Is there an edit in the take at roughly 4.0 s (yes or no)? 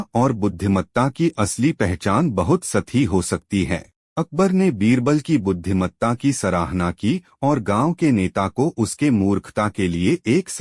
yes